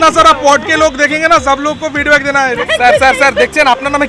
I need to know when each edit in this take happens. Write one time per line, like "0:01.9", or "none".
0:02.6